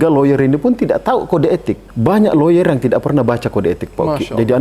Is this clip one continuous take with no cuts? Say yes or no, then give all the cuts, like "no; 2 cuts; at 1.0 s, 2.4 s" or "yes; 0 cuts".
no; 1 cut; at 1.9 s